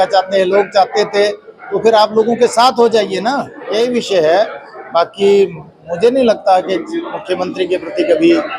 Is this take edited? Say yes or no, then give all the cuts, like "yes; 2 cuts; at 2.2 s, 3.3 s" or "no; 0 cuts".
yes; 1 cut; at 3.5 s